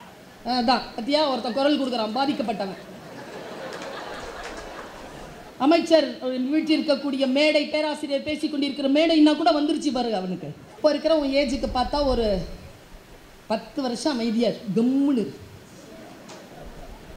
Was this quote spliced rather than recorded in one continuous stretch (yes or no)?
yes